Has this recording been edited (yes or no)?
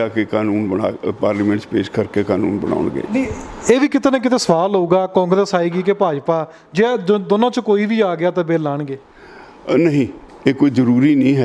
no